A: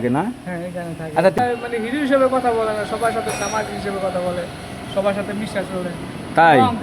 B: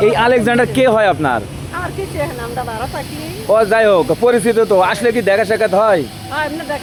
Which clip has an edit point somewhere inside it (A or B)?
A